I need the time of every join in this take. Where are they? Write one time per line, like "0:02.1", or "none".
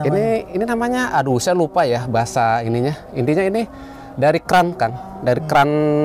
none

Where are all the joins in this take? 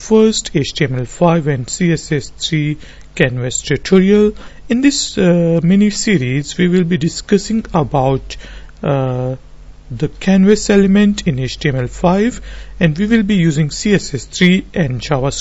none

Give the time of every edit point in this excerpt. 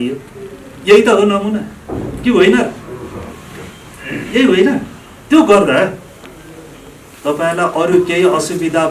none

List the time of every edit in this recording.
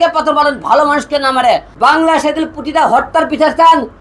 0:01.7

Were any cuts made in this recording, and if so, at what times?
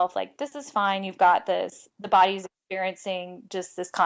none

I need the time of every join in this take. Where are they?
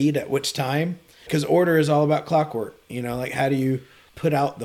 0:01.2

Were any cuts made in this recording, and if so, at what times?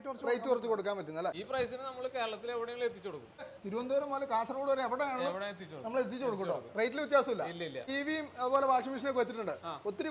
0:01.4
0:03.5
0:07.9

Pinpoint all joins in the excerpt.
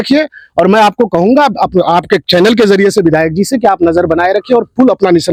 none

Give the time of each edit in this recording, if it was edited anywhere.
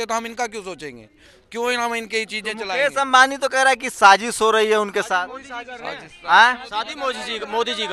none

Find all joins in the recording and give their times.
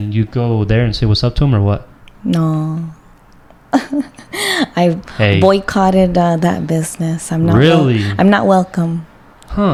none

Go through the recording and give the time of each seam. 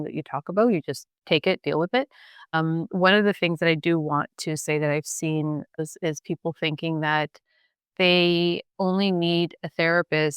0:01.1
0:02.5
0:05.8
0:08.7

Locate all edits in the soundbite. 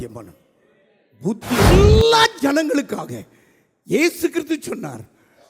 0:01.7

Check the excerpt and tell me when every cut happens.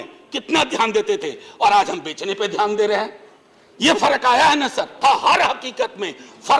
0:05.0

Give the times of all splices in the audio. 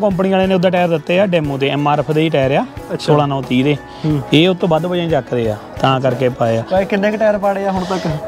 none

